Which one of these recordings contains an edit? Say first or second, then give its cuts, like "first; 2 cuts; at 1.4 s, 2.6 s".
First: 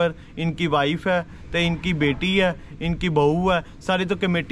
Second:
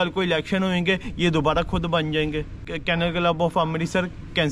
second; 1 cut; at 2.7 s